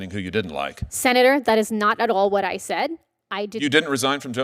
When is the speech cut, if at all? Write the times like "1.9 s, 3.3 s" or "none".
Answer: none